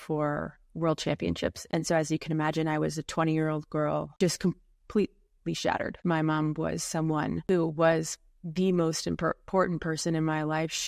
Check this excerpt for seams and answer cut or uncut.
cut